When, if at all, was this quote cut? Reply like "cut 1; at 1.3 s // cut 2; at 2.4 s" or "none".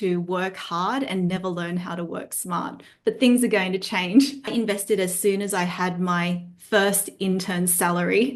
cut 1; at 4.5 s

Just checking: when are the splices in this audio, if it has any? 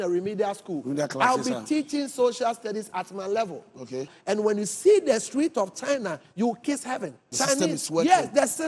cut 1; at 4.1 s // cut 2; at 7.3 s

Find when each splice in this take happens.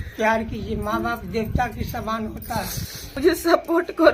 cut 1; at 3.1 s

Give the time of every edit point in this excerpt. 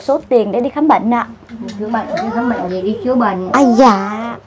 none

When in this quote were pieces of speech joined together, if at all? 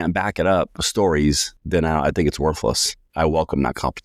cut 1; at 1.5 s // cut 2; at 3.1 s

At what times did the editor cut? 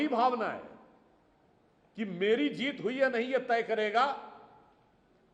none

